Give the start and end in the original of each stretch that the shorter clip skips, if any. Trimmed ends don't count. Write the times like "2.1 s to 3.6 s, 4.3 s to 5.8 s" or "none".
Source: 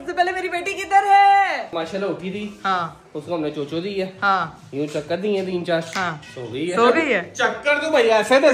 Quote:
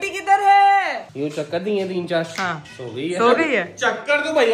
1.7 s to 4.6 s